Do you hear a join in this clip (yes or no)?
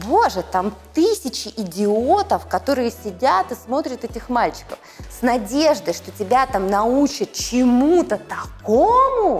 yes